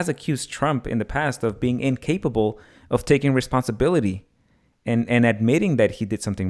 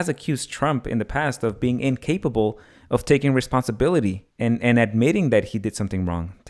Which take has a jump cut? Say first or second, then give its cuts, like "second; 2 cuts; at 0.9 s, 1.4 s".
second; 1 cut; at 4.3 s